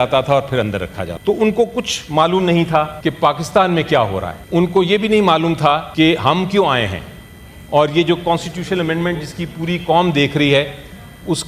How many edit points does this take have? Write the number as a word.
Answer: four